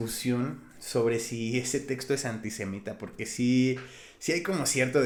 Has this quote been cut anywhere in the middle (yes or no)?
no